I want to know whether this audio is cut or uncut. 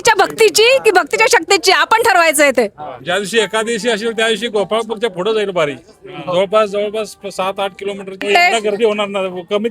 cut